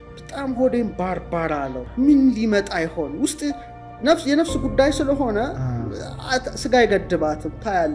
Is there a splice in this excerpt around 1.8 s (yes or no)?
yes